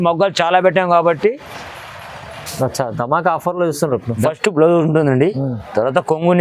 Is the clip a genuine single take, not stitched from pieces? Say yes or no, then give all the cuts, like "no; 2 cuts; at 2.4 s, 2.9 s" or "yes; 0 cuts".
no; 1 cut; at 4.2 s